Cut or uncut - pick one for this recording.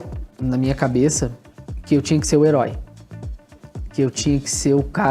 uncut